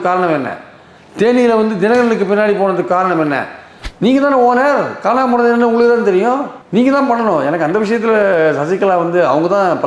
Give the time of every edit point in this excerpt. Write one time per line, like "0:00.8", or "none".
0:03.8